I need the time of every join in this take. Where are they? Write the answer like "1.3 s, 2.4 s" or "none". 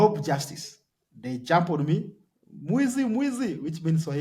none